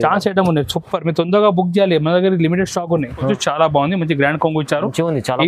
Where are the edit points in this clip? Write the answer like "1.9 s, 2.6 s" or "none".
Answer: 3.3 s